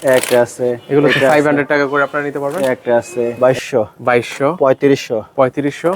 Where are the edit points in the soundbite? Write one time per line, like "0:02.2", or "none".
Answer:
0:03.3